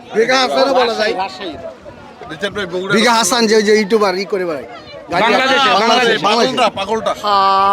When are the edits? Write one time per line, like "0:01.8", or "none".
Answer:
none